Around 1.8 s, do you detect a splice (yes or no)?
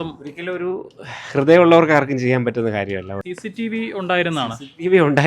no